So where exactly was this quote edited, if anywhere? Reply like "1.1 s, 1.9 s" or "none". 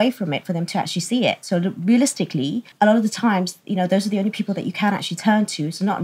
2.6 s